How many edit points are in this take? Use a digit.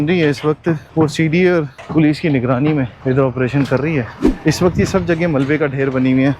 4